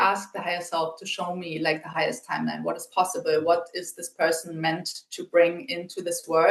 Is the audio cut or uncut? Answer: uncut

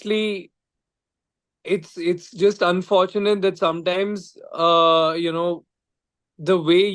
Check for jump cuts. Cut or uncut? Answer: uncut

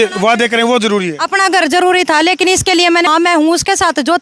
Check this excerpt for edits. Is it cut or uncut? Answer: cut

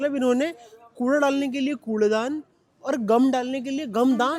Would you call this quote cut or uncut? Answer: uncut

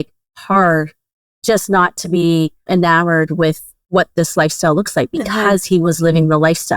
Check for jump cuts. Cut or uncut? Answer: cut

